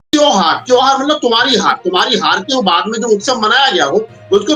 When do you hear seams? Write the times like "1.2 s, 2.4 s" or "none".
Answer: none